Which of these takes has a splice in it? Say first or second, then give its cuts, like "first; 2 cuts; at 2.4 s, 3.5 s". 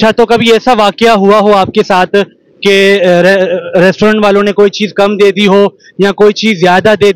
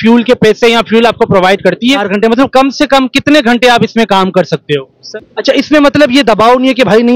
second; 2 cuts; at 2.0 s, 5.0 s